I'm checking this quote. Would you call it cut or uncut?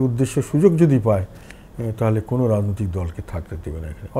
uncut